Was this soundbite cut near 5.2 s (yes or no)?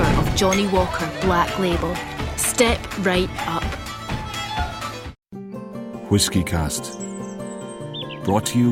yes